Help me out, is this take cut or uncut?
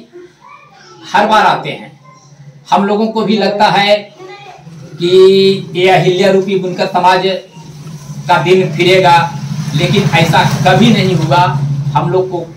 uncut